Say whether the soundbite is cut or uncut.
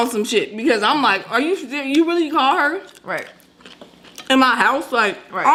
uncut